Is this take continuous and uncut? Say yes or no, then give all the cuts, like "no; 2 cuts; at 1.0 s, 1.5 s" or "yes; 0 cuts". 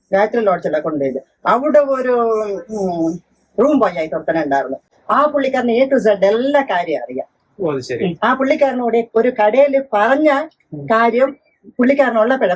yes; 0 cuts